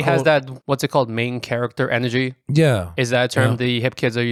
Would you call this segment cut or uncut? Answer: uncut